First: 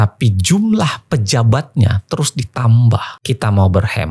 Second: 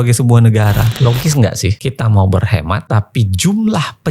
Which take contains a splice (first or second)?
second